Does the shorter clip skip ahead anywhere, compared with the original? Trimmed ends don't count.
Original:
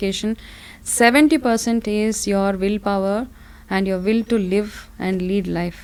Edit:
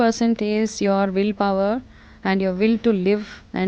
no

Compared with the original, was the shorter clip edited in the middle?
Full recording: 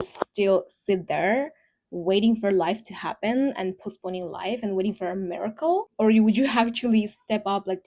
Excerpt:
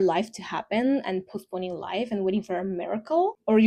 no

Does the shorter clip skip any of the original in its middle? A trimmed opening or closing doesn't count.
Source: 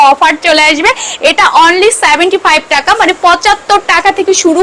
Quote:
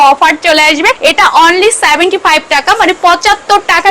yes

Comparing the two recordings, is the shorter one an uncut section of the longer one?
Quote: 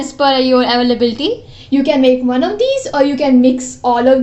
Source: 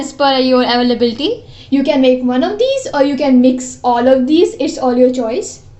yes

